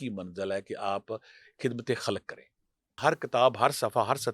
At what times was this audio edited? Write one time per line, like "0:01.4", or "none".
0:03.0